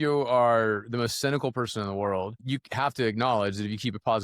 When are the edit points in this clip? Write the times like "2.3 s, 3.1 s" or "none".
2.3 s

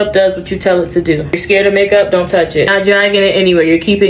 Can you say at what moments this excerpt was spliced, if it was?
1.4 s, 2.7 s

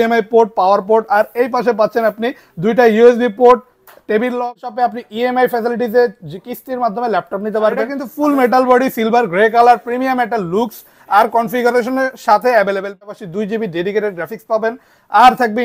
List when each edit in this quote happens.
4.4 s, 8.0 s, 13.0 s

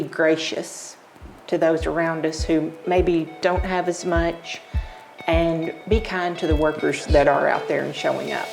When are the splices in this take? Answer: 5.8 s

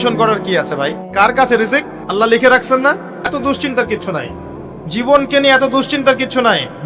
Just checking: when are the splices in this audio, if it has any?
1.0 s, 2.0 s, 3.4 s

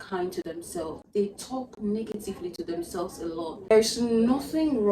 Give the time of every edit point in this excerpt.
3.6 s

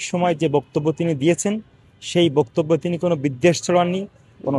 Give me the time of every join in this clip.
none

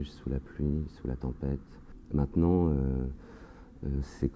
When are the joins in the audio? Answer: 2.0 s

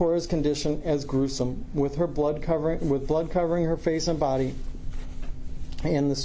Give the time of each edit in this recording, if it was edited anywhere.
none

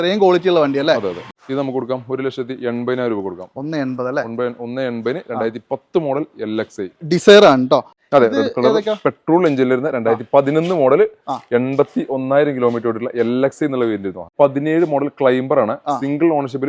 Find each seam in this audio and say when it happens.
1.2 s, 8.0 s, 14.3 s

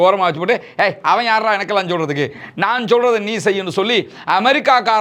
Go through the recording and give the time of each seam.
none

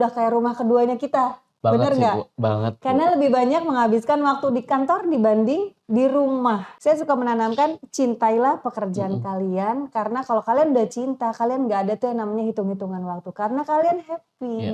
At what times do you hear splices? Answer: 6.7 s

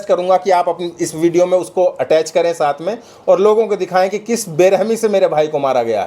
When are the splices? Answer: none

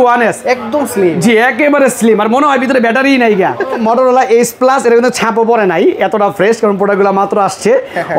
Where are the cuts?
3.8 s

